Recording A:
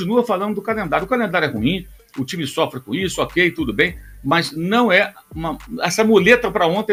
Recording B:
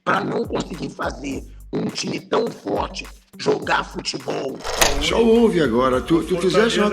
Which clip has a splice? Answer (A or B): B